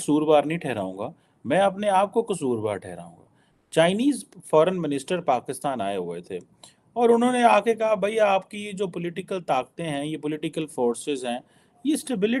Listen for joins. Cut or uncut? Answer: uncut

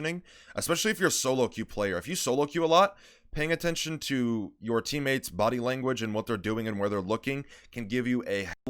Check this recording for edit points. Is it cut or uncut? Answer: uncut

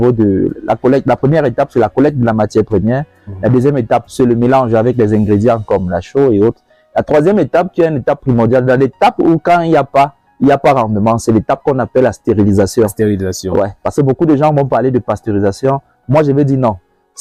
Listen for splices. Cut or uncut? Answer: uncut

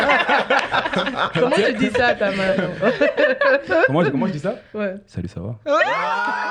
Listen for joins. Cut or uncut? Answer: uncut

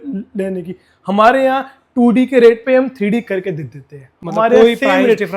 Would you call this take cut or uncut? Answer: uncut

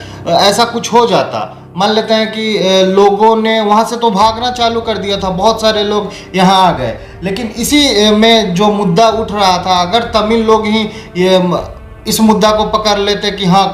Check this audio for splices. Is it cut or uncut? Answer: uncut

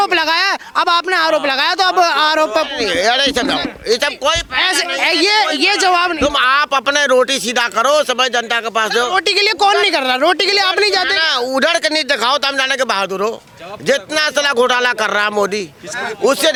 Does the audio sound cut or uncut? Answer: uncut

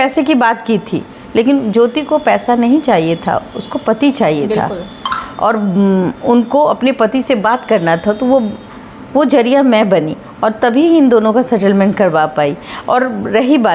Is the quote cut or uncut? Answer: uncut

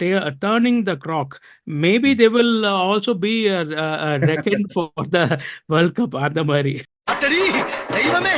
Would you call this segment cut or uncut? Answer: uncut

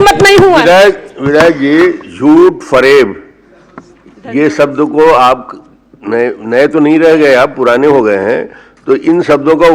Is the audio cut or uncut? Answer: uncut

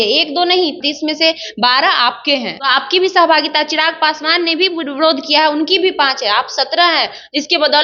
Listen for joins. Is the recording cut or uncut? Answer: cut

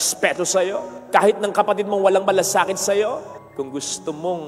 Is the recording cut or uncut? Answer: uncut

